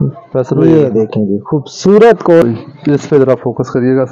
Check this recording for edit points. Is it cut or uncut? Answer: cut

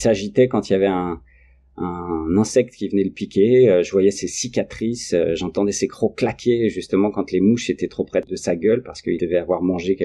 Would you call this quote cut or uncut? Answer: cut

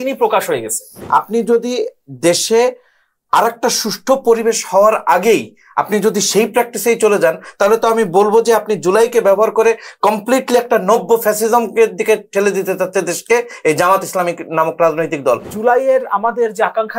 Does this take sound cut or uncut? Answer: cut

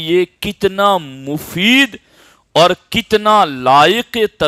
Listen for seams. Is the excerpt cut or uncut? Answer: uncut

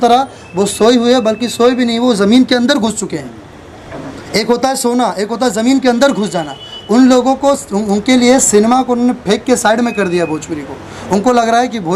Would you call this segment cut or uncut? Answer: uncut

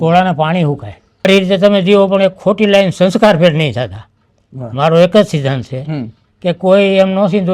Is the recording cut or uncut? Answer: cut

